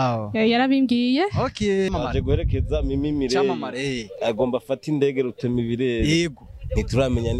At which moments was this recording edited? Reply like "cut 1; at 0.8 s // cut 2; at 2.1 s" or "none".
cut 1; at 1.9 s

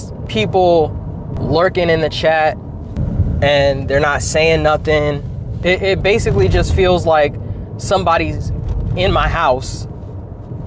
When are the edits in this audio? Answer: none

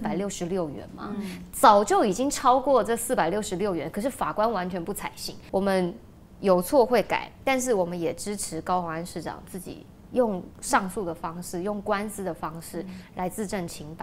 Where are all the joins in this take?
none

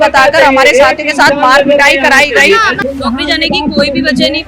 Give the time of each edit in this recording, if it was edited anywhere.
cut 1; at 2.7 s

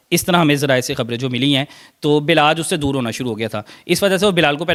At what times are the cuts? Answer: none

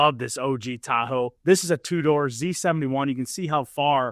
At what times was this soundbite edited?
none

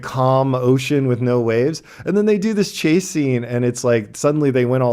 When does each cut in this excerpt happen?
none

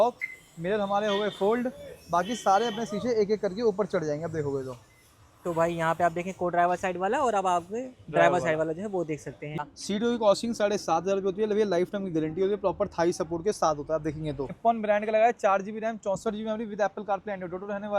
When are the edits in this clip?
cut 1; at 9.6 s // cut 2; at 14.5 s

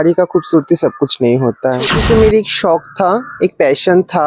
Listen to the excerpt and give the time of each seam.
cut 1; at 2.0 s

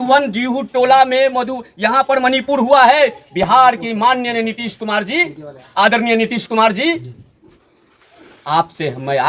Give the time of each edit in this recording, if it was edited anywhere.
none

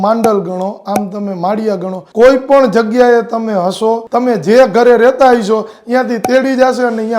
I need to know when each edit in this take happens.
cut 1; at 4.0 s

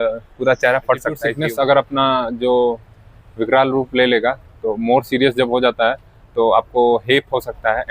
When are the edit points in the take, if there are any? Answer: cut 1; at 1.3 s

